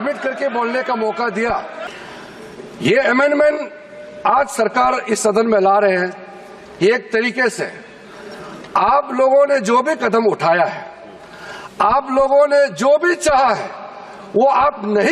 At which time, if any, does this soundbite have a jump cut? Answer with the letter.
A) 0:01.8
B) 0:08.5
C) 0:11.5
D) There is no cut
A